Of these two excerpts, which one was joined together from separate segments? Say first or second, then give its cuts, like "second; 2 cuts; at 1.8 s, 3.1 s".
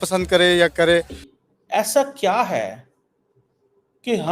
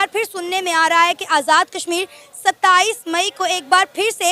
first; 1 cut; at 1.2 s